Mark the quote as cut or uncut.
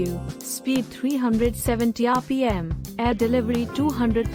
uncut